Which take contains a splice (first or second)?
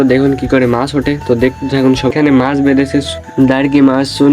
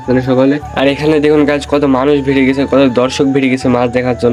first